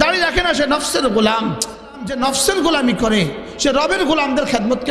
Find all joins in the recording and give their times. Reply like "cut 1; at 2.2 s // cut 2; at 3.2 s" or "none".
cut 1; at 2.2 s